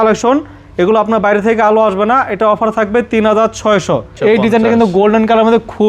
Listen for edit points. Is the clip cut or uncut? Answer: cut